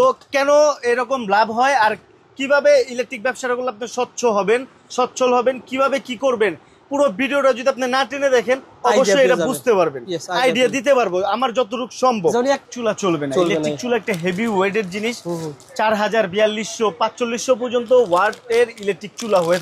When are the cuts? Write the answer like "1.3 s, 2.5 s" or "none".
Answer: 12.6 s

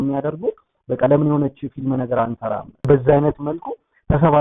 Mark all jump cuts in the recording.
2.8 s

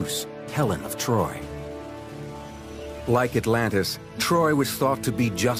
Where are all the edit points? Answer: none

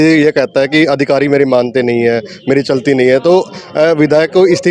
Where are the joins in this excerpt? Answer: none

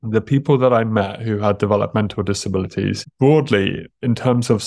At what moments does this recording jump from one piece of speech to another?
3.0 s

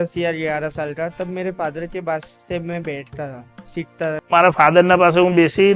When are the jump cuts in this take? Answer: 4.3 s

